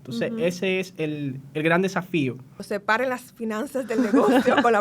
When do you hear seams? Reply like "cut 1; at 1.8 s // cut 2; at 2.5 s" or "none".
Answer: cut 1; at 2.5 s

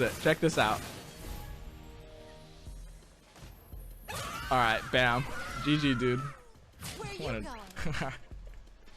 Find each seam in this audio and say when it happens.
cut 1; at 1.2 s

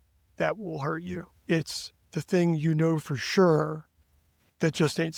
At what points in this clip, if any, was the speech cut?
none

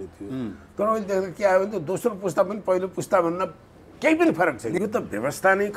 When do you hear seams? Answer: cut 1; at 4.8 s

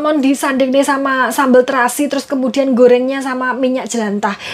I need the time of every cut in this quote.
none

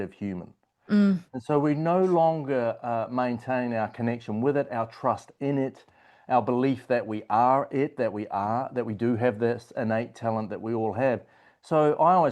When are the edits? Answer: none

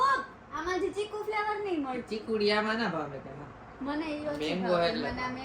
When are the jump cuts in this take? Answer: none

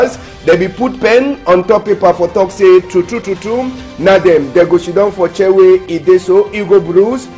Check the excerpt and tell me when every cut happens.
none

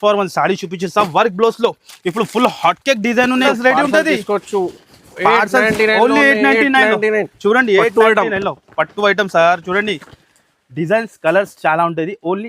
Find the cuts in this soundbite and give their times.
cut 1; at 3.4 s

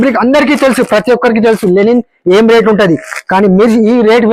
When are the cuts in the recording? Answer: none

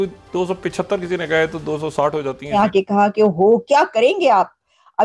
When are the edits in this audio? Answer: cut 1; at 2.5 s

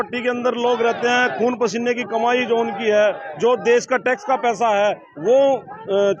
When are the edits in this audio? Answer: none

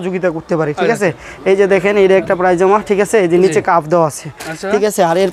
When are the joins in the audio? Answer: none

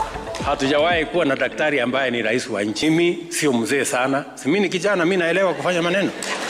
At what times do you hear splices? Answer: cut 1; at 2.8 s

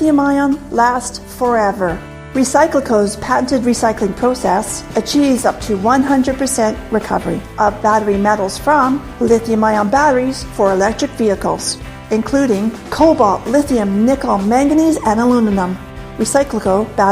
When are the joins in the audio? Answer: cut 1; at 1.0 s

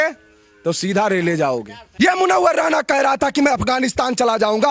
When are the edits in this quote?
cut 1; at 1.8 s

